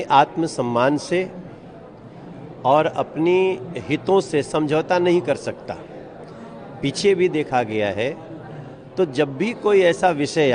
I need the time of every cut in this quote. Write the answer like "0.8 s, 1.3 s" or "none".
none